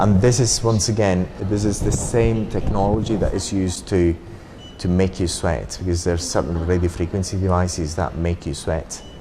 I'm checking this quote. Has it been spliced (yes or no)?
no